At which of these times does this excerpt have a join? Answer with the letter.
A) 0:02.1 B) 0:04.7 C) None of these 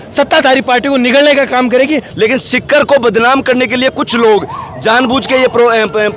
A